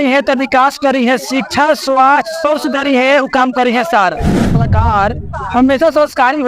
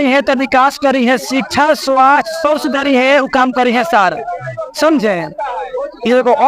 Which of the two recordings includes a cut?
first; 1 cut; at 4.7 s

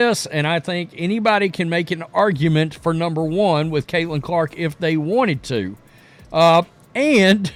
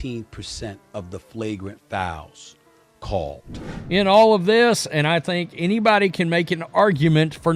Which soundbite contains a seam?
second; 1 cut; at 3.6 s

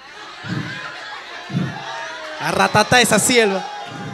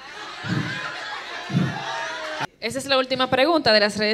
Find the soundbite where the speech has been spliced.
second; 1 cut; at 2.4 s

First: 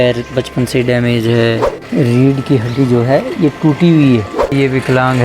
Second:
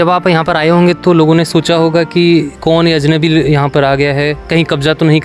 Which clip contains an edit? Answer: first; 2 cuts; at 1.7 s, 4.5 s

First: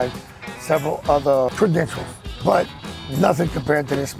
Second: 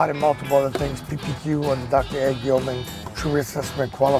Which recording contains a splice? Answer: first; 1 cut; at 1.7 s

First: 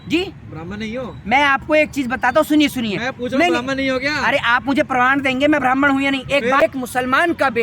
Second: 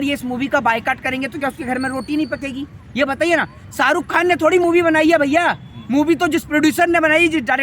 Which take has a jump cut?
first; 1 cut; at 6.6 s

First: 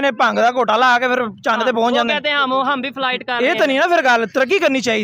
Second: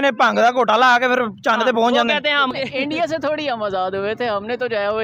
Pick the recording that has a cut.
second; 1 cut; at 2.5 s

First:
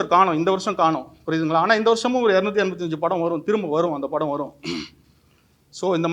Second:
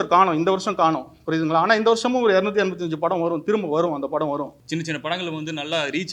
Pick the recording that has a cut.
second; 1 cut; at 4.6 s

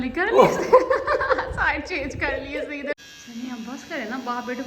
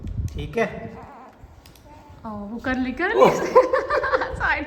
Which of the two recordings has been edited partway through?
first; 1 cut; at 3.0 s

